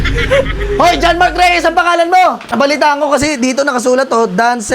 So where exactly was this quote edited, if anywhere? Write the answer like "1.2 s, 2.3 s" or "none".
2.4 s